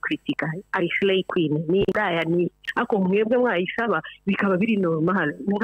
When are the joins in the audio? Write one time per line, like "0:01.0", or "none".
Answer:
none